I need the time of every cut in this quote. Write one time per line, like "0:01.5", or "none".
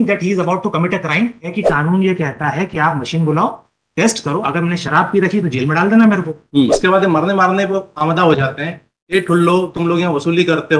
0:01.5
0:06.4